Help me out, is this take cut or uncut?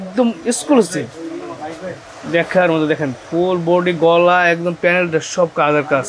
uncut